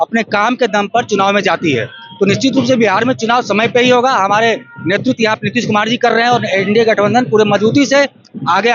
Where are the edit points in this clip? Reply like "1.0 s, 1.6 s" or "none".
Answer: none